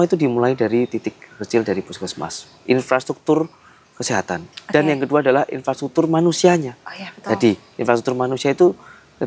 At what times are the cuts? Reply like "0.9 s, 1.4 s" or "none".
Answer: none